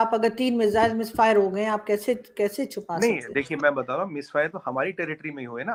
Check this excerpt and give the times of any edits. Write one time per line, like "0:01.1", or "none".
none